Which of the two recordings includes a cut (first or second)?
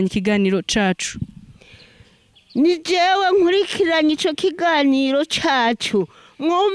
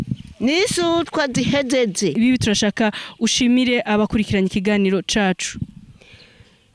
second